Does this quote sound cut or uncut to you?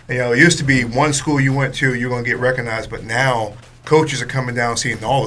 uncut